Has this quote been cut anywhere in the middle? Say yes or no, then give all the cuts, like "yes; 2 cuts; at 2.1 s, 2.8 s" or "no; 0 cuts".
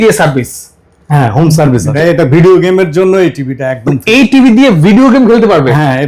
yes; 1 cut; at 1.9 s